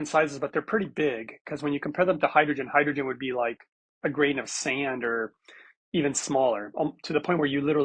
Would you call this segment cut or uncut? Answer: uncut